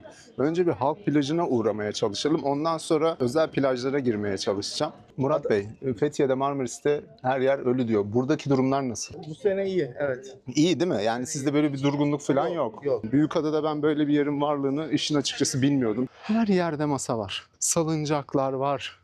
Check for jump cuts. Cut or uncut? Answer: cut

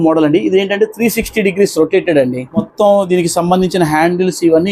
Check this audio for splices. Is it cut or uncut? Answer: uncut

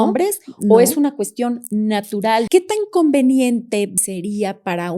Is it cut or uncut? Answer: cut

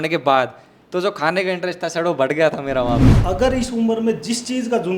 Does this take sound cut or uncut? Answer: cut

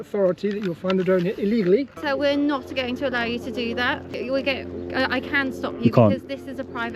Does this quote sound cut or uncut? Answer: cut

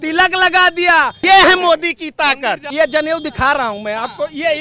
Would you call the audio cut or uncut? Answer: cut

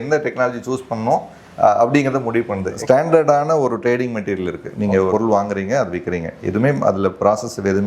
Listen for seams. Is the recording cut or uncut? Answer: cut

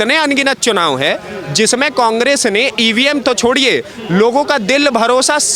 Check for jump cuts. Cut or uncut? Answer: uncut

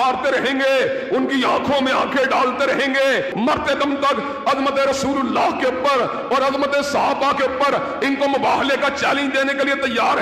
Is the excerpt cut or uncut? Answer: uncut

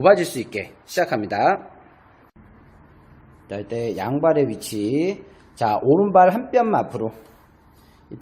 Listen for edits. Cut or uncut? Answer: cut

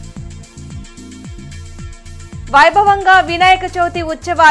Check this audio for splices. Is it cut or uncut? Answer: uncut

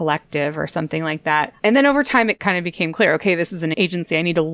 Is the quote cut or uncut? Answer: cut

